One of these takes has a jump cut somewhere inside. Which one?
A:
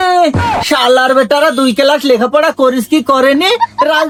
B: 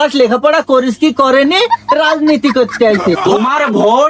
B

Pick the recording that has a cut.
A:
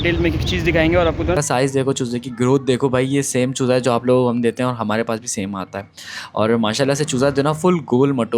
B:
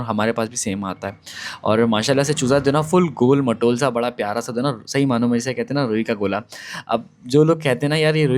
A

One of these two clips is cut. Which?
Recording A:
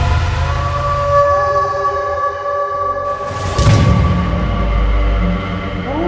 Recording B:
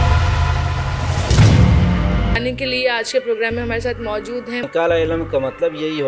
B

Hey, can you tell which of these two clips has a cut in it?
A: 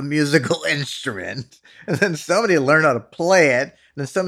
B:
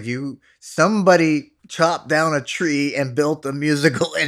B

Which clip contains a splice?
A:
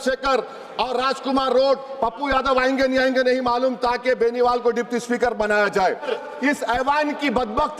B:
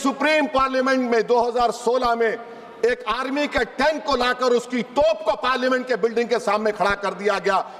A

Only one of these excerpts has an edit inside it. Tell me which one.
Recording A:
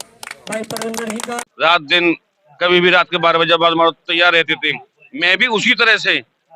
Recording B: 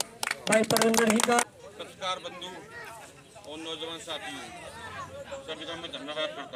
A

